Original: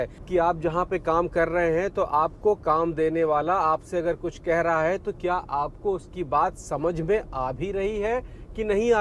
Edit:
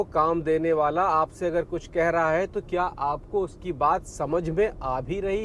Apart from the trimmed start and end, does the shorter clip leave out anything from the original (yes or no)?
no